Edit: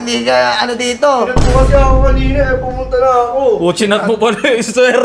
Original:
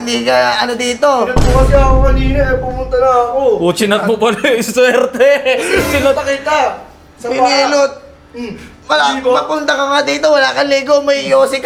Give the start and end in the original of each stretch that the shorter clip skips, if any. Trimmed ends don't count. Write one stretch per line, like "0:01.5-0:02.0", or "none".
none